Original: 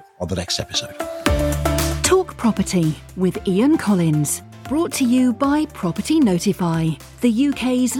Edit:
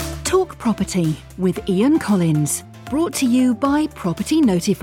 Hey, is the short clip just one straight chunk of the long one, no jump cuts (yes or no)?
yes